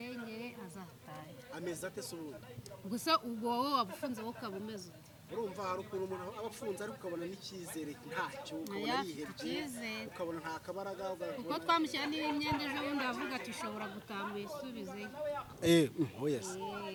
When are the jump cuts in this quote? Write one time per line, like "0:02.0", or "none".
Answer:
none

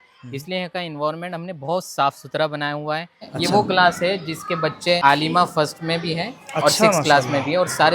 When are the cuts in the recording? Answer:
0:03.3
0:05.0

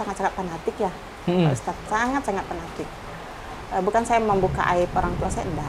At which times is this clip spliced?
none

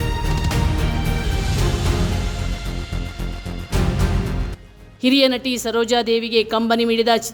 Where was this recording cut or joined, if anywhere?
none

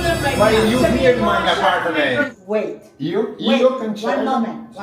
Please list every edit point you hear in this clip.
0:00.9
0:02.3

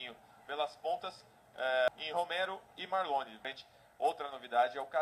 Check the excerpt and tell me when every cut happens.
0:01.9
0:03.4

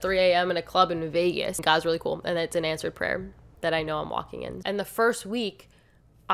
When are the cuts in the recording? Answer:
0:01.6
0:04.6

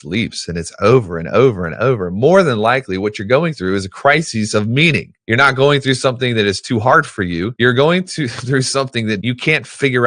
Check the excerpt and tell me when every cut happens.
0:05.1
0:07.5
0:09.2

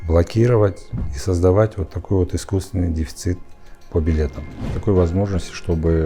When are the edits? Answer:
0:04.8

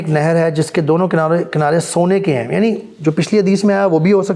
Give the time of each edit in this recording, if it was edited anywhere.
none

